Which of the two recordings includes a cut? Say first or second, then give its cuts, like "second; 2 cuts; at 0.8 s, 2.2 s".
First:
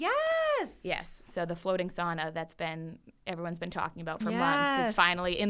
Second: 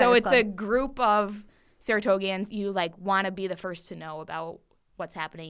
second; 1 cut; at 2.5 s